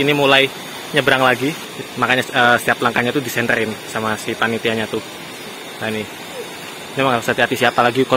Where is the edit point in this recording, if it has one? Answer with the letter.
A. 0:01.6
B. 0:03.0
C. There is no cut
A